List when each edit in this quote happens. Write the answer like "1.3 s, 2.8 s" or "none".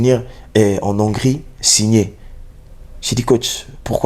none

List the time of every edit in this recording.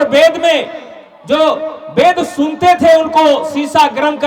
none

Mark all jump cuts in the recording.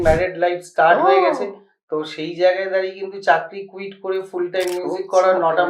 none

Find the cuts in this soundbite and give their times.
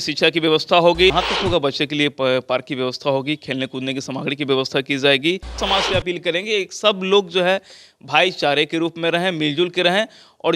1.1 s, 5.6 s

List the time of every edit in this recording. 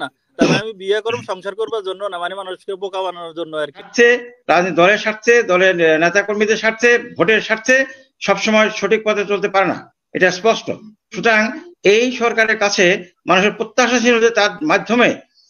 3.9 s

